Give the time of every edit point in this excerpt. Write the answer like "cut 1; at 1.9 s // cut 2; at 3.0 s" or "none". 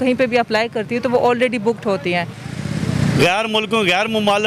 cut 1; at 2.4 s